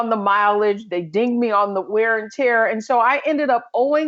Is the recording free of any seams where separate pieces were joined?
yes; 0 cuts

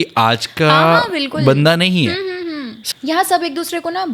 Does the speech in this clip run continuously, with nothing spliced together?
no; 1 cut; at 2.7 s

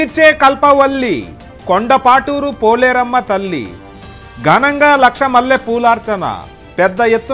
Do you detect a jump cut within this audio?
no; 0 cuts

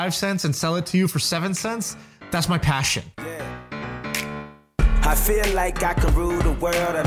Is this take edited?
yes; 1 cut; at 3.1 s

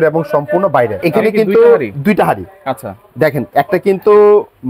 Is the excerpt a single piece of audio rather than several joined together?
no; 1 cut; at 1.0 s

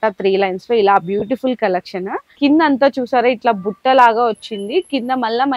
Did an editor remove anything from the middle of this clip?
yes; 1 cut; at 2.2 s

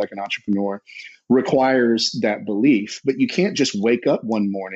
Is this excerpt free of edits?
yes; 0 cuts

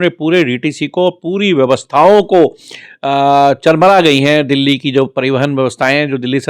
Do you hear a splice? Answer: no; 0 cuts

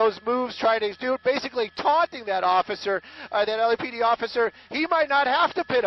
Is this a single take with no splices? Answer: no; 1 cut; at 3.1 s

